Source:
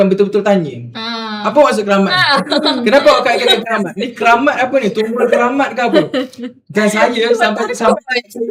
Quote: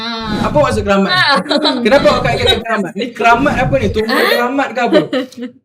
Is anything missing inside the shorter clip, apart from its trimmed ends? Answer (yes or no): no